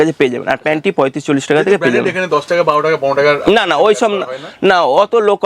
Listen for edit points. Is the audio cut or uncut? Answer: uncut